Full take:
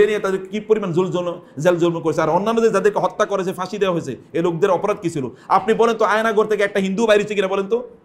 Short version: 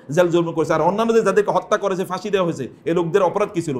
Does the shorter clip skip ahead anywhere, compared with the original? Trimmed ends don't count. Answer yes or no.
no